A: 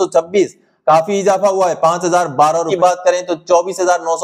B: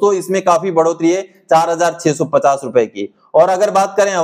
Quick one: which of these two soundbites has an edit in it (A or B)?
A